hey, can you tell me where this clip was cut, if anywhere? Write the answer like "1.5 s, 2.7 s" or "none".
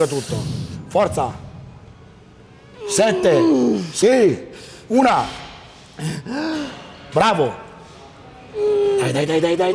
none